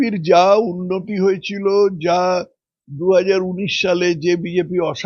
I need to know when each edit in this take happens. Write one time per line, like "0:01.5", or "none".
none